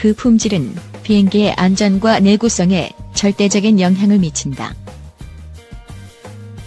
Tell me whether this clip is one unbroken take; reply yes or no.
yes